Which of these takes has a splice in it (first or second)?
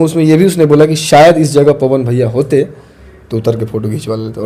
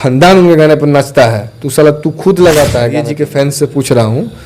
second